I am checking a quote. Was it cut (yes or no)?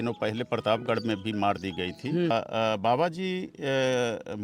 yes